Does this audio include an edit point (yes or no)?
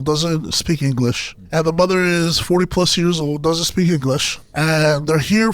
yes